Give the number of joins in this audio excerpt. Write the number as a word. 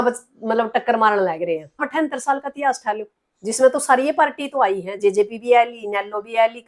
one